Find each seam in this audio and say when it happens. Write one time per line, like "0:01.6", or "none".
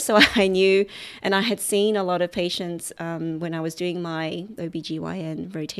0:04.6

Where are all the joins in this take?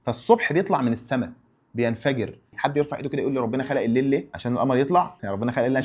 0:02.5
0:04.3

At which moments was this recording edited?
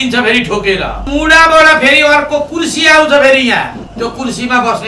0:01.1
0:03.8

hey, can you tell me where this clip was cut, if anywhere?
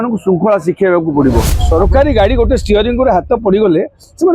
0:01.5

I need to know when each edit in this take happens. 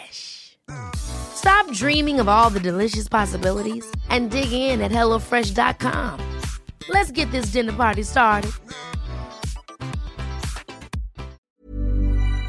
0:11.4

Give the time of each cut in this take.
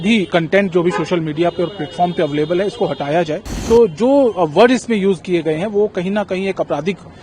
0:03.5

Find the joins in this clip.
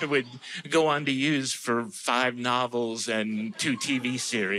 none

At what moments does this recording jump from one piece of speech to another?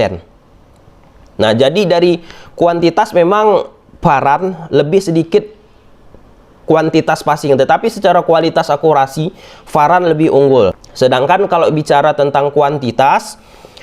0:10.8

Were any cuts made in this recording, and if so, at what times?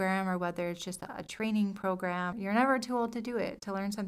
0:02.3

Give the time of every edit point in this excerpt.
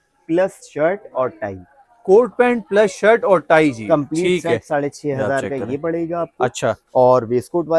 none

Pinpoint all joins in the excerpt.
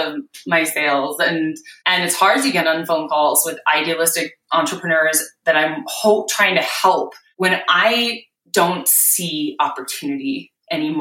0:01.7
0:07.2

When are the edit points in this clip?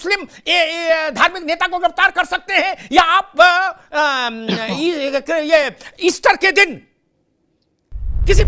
none

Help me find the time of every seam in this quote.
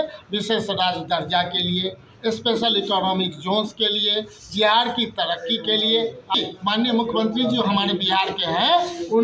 0:06.4

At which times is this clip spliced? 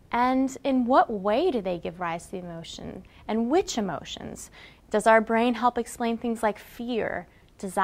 0:03.7

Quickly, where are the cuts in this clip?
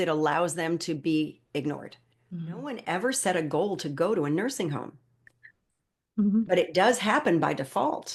0:02.9

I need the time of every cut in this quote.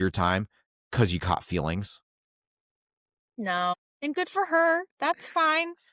0:03.9

